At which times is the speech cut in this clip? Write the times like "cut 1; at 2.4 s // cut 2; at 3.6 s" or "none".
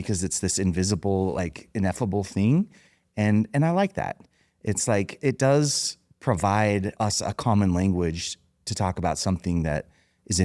cut 1; at 6.9 s